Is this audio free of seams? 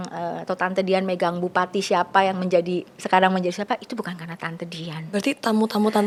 yes; 0 cuts

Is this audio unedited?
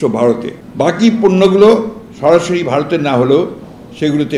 yes; 0 cuts

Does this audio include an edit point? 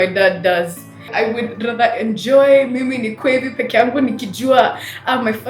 yes; 1 cut; at 1.1 s

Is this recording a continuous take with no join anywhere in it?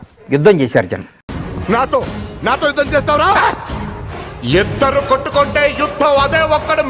yes; 0 cuts

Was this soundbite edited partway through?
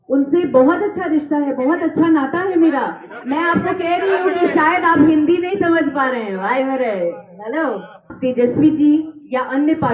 yes; 1 cut; at 8.1 s

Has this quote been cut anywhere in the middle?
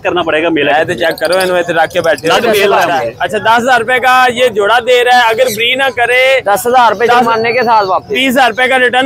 yes; 1 cut; at 2.9 s

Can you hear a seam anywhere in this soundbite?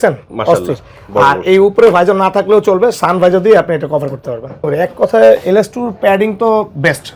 yes; 1 cut; at 4.7 s

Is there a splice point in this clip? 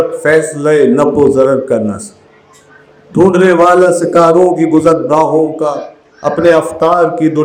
no; 0 cuts

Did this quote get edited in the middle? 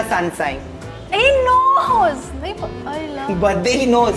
no; 0 cuts

